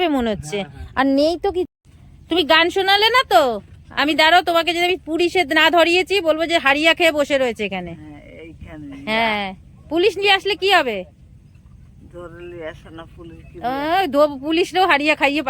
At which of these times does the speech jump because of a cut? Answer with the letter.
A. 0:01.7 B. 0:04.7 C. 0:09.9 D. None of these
A